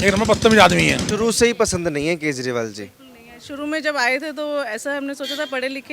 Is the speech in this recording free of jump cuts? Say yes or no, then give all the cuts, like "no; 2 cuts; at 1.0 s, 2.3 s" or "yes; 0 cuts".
no; 1 cut; at 1.0 s